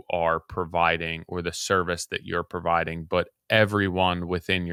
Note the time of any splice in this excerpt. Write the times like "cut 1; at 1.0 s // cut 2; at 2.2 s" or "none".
none